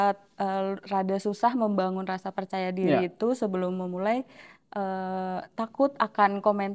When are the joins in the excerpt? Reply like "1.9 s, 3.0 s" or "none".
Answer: none